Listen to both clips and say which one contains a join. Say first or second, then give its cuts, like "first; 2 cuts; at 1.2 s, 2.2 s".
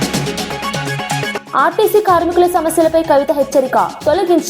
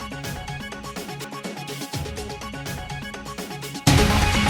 first; 1 cut; at 1.4 s